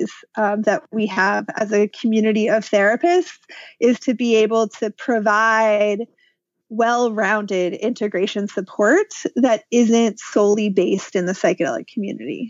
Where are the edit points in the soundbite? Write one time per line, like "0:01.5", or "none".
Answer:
none